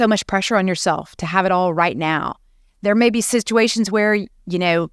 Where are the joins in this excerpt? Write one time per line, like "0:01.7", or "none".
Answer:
none

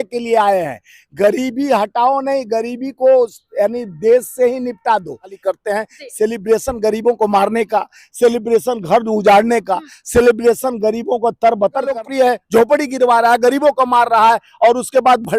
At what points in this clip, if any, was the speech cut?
0:05.4
0:11.9

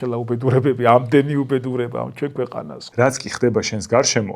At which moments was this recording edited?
0:02.8

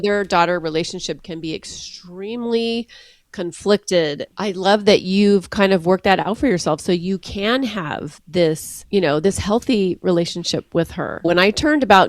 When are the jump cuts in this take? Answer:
0:04.3
0:08.7
0:11.2

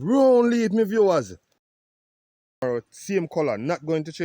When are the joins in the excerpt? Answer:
0:02.0

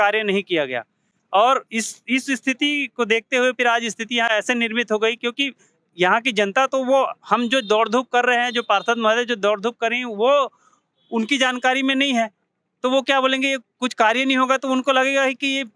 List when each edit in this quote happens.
none

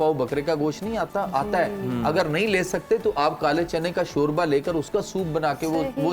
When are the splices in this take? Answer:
none

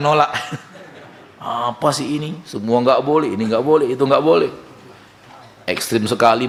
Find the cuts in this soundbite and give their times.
none

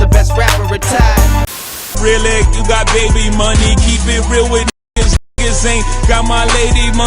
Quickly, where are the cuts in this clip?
0:02.0

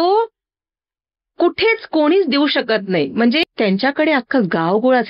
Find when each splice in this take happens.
0:03.4

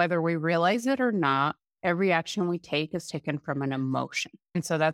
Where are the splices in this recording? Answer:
none

